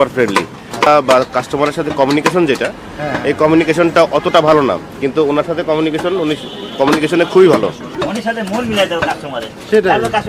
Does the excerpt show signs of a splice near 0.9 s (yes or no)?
yes